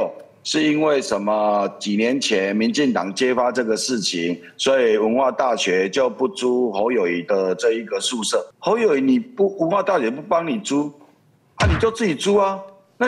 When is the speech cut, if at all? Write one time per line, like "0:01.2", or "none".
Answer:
0:08.5